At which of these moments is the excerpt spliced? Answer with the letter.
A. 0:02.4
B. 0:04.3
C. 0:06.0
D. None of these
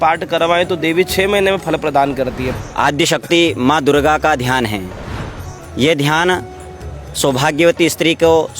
A